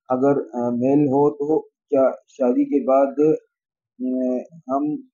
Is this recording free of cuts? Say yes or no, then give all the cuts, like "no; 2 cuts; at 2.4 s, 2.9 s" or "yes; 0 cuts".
yes; 0 cuts